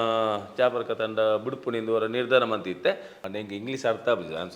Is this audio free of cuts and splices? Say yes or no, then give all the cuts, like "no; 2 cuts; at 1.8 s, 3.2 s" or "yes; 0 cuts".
no; 1 cut; at 3.1 s